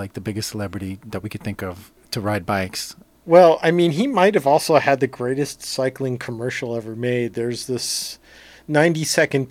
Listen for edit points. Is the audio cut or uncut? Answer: uncut